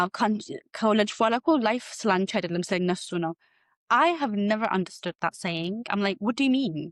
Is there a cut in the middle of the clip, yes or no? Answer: no